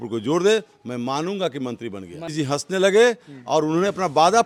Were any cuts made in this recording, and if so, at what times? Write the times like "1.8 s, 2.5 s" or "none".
none

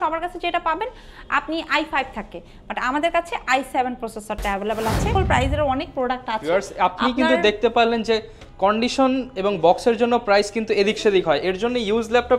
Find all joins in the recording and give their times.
5.1 s

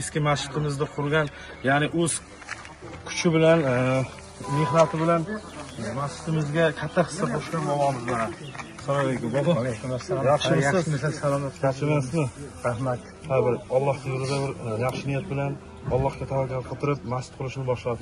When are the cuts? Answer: none

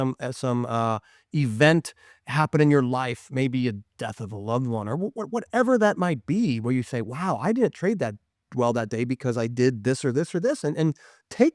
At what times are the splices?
none

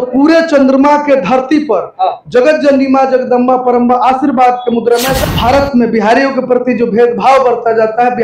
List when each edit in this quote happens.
5.1 s

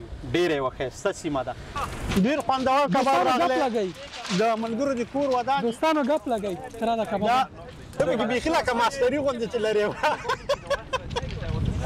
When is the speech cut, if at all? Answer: 1.7 s, 8.0 s

